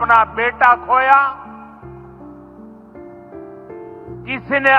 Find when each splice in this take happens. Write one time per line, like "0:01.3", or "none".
0:01.5
0:03.9